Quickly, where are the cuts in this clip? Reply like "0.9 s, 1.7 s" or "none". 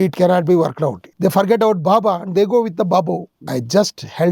1.0 s, 3.3 s